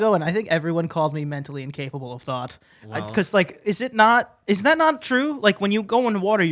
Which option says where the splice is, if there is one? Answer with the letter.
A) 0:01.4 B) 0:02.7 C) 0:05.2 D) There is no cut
D